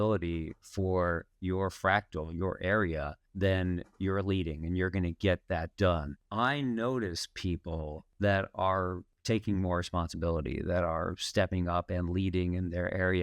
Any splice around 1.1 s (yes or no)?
no